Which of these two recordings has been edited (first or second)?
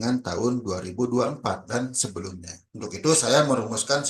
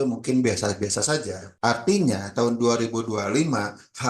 second